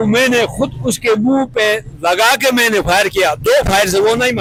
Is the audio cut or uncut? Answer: uncut